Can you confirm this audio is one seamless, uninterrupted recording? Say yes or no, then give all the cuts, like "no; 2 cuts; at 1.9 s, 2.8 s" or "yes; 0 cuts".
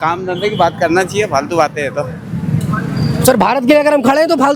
yes; 0 cuts